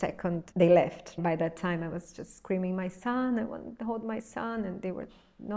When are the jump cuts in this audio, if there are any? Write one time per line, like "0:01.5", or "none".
none